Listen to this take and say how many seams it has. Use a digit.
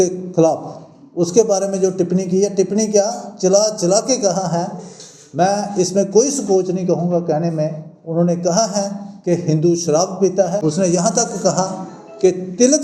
1